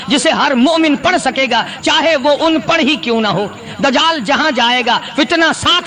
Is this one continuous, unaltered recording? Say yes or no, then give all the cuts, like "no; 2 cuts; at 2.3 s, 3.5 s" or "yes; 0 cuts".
yes; 0 cuts